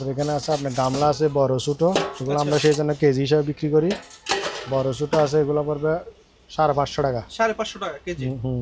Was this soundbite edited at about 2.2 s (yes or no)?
no